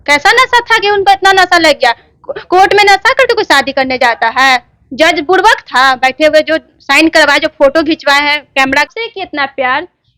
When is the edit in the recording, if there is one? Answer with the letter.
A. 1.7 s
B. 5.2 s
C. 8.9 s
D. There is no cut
C